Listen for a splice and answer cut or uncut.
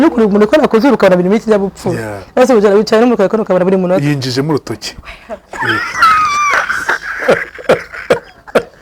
uncut